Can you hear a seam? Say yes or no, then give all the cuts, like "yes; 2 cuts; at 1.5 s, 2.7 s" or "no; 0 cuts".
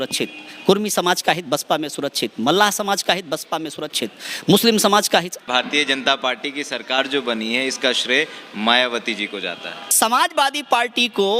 yes; 2 cuts; at 5.5 s, 9.8 s